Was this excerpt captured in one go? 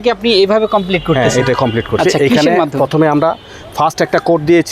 yes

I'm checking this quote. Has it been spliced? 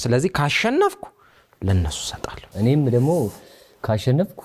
yes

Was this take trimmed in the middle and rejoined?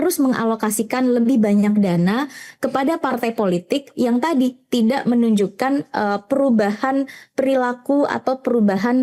no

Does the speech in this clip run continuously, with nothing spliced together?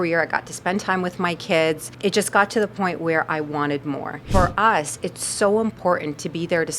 no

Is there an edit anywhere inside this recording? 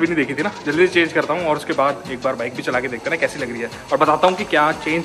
no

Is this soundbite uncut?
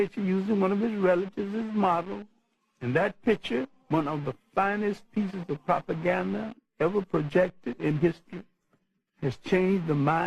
yes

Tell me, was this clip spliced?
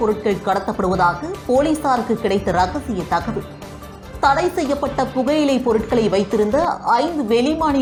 no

